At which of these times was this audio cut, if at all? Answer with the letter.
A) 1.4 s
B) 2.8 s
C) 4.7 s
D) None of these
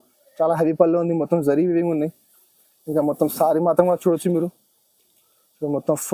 D